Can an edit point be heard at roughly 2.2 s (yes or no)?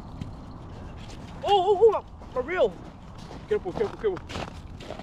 no